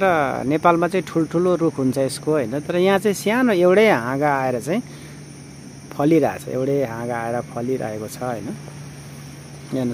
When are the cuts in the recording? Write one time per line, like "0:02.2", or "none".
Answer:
none